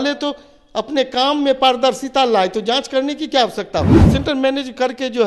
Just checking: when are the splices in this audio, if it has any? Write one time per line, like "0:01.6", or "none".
0:04.1

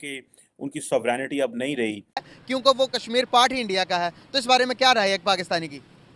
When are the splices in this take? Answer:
0:02.3

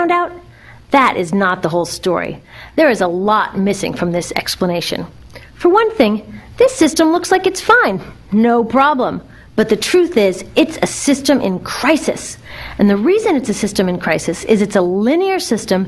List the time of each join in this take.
0:02.8

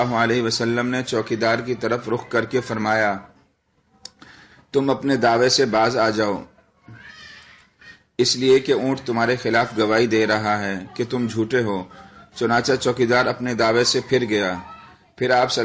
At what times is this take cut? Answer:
0:08.6

